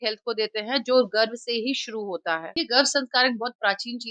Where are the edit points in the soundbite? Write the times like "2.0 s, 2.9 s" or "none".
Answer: 2.5 s